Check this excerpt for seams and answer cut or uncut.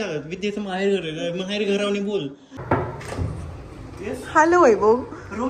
cut